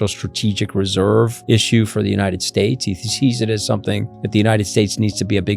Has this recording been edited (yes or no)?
yes